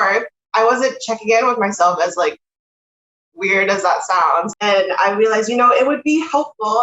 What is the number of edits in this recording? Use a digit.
1